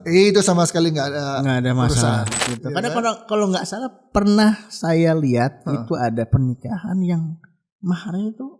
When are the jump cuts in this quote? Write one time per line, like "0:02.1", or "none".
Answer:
0:02.4

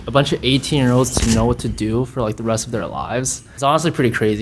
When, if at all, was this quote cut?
none

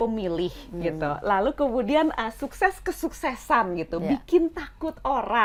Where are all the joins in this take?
none

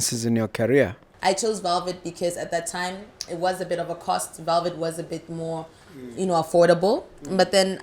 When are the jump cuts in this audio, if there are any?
0:01.0

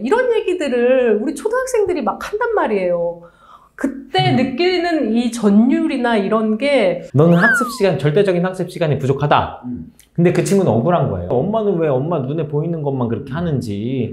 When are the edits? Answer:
0:07.0
0:11.3

